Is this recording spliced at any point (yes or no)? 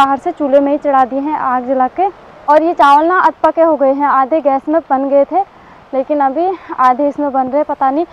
no